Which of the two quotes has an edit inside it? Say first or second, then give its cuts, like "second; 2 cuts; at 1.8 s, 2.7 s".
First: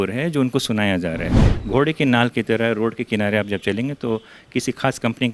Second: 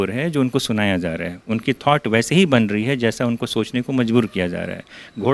first; 1 cut; at 1.3 s